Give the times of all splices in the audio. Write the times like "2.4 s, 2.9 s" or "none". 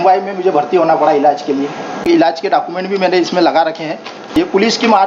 2.1 s, 4.3 s